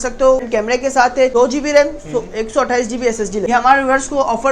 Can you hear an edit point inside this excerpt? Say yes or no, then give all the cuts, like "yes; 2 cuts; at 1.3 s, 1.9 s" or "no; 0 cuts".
yes; 2 cuts; at 1.0 s, 3.5 s